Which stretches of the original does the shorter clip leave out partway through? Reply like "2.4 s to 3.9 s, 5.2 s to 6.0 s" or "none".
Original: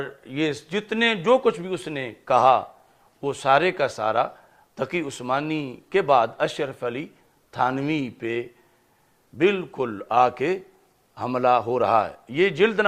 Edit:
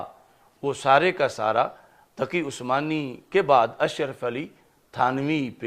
none

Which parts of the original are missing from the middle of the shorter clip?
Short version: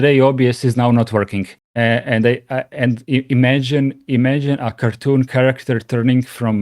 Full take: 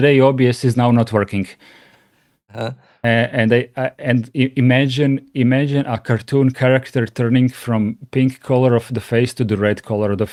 1.6 s to 2.9 s

